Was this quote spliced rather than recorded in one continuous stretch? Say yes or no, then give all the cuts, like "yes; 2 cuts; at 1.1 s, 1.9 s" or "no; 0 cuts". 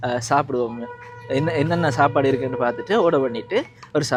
no; 0 cuts